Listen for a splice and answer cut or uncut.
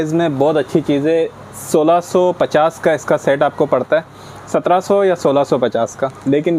uncut